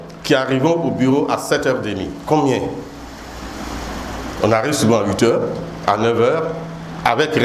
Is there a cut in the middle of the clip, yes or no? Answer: no